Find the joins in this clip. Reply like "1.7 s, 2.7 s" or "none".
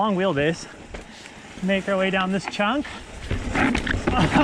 none